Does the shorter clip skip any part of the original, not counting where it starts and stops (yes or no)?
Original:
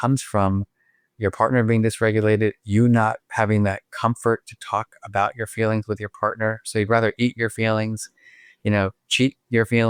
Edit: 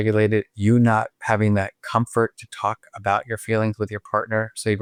no